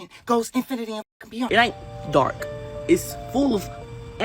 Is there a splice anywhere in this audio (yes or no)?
yes